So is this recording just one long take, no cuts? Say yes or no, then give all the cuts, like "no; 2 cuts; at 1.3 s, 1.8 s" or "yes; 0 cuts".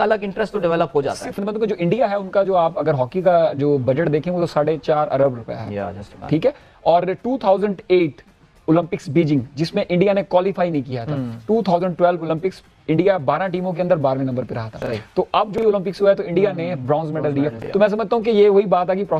yes; 0 cuts